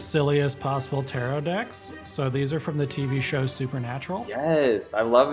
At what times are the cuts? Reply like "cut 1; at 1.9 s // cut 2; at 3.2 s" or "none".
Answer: cut 1; at 4.3 s